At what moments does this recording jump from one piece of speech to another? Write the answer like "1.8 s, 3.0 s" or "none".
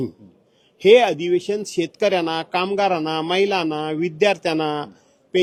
none